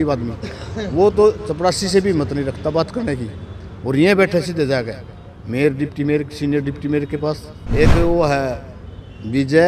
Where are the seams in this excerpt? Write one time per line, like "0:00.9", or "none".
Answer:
0:07.5

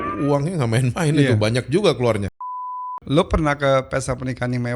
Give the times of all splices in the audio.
0:03.0

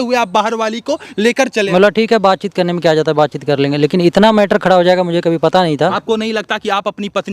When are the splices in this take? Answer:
0:01.7
0:06.0

